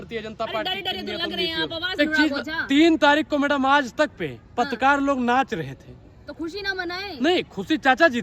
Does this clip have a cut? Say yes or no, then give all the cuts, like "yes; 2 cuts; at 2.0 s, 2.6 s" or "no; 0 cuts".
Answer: yes; 1 cut; at 2.0 s